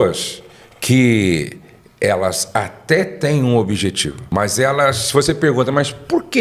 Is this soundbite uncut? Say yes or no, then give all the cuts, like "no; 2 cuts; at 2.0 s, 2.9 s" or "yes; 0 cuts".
no; 1 cut; at 4.1 s